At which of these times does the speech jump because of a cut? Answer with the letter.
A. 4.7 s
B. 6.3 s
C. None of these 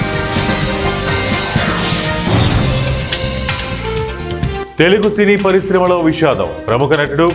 A